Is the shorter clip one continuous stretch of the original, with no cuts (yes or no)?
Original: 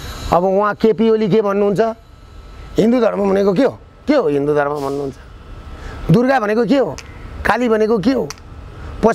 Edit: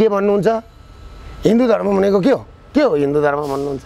yes